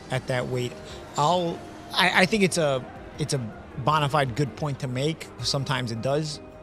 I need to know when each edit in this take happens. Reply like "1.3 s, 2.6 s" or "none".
none